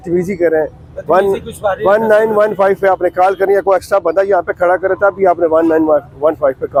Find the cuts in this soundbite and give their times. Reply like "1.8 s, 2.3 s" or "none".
none